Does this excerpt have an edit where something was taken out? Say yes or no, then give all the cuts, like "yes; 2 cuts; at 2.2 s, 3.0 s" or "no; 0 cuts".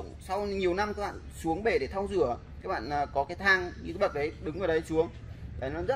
no; 0 cuts